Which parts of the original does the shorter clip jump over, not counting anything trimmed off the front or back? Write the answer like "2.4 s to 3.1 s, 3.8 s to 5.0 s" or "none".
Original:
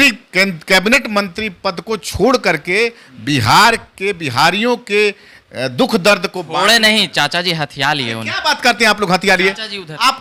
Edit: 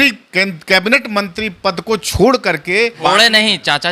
3.0 s to 6.5 s